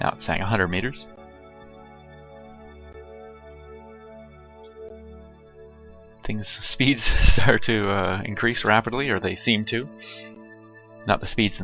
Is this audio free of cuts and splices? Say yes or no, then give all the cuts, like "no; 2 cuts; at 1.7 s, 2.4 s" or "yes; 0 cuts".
yes; 0 cuts